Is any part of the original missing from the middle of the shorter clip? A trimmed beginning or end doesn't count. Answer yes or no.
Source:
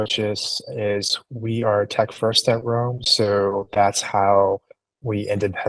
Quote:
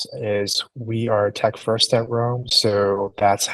no